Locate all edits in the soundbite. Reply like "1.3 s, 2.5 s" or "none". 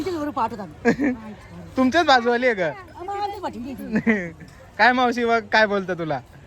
none